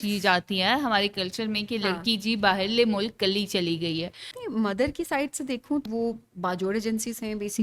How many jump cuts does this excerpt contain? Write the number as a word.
two